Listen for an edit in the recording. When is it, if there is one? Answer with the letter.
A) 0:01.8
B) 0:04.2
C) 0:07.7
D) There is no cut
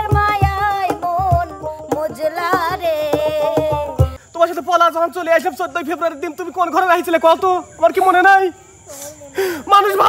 B